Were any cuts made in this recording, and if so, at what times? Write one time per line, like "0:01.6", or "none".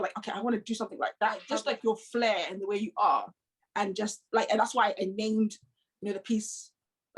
0:01.4